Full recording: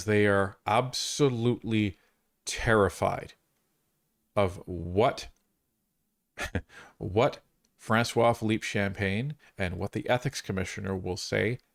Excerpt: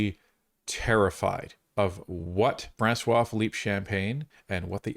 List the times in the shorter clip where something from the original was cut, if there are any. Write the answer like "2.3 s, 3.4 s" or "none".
1.5 s, 2.7 s